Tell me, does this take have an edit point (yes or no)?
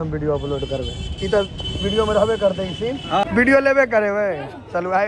yes